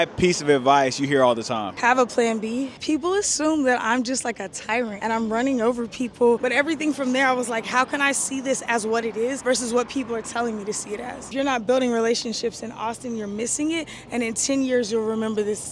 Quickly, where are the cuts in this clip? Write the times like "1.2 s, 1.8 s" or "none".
2.7 s, 6.4 s, 11.3 s